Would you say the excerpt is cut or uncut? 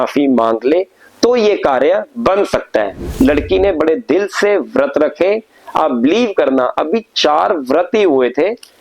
cut